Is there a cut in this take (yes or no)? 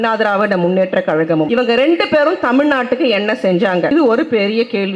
yes